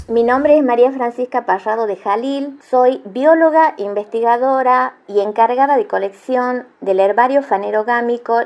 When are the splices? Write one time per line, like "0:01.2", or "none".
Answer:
0:02.6